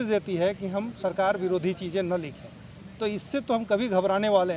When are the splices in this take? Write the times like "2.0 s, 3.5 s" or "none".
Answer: none